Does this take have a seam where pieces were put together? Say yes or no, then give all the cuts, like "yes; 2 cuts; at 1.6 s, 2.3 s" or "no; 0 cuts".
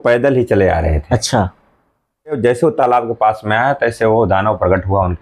yes; 1 cut; at 2.4 s